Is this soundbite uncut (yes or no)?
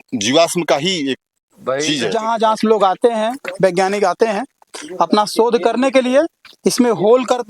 no